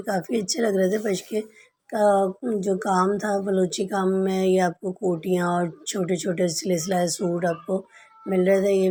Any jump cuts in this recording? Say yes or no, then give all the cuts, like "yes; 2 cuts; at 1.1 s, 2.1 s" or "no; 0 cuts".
no; 0 cuts